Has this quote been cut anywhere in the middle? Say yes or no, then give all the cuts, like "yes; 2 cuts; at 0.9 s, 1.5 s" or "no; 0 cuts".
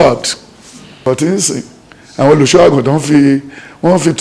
yes; 1 cut; at 1.1 s